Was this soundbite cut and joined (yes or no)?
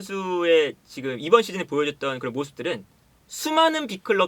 no